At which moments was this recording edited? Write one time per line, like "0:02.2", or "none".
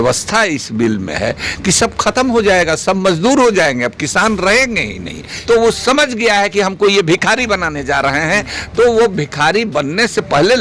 0:05.3